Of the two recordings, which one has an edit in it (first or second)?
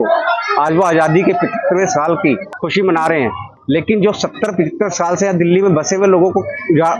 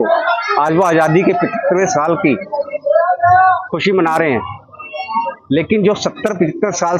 first